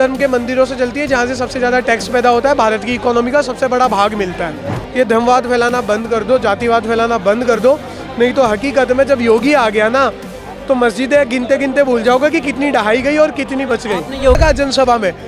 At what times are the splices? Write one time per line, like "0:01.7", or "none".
0:04.8
0:14.4